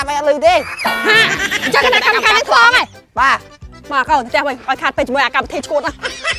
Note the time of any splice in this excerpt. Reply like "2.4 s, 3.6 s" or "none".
none